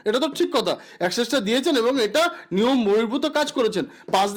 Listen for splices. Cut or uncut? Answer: uncut